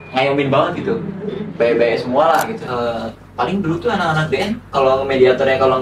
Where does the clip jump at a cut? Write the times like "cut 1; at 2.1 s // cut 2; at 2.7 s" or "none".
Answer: cut 1; at 2.6 s